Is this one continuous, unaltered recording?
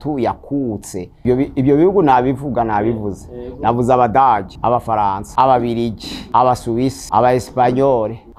no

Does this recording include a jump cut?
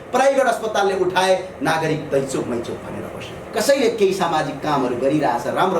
yes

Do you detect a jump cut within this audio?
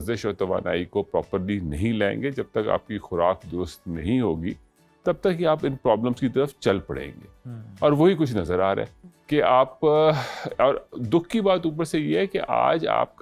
no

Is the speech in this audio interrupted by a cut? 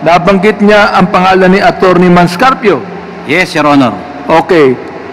no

